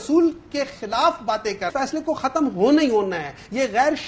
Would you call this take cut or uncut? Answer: cut